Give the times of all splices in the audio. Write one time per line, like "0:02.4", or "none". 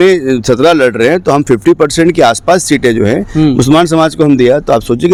none